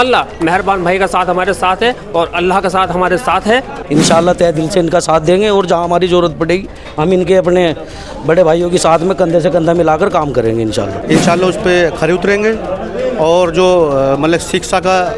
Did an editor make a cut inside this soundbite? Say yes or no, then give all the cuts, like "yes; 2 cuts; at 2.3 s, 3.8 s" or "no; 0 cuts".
yes; 2 cuts; at 3.8 s, 11.0 s